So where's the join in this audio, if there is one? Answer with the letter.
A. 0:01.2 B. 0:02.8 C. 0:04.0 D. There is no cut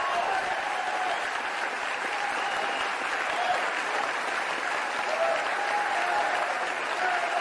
B